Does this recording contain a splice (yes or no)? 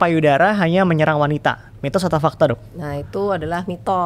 no